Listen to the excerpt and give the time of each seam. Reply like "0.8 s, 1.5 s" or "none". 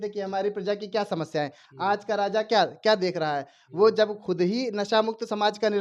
none